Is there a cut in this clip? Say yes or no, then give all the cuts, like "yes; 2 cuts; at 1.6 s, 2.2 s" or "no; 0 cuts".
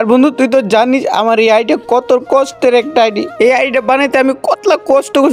no; 0 cuts